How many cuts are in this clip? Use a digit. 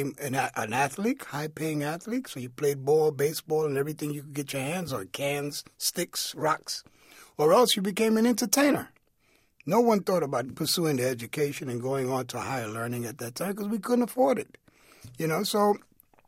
1